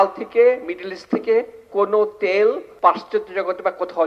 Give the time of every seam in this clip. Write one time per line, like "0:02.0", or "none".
0:02.7